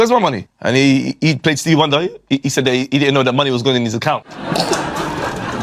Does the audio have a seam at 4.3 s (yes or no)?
no